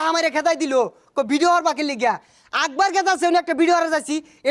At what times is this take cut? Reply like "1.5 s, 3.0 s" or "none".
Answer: none